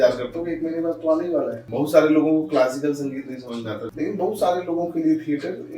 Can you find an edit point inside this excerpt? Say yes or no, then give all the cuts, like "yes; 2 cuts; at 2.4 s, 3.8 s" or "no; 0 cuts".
yes; 2 cuts; at 1.6 s, 3.9 s